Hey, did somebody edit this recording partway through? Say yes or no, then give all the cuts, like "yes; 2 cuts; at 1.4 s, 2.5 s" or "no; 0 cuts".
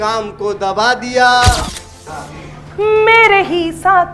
yes; 1 cut; at 1.7 s